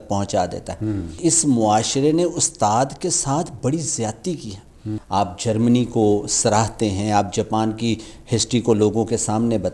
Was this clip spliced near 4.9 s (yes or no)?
yes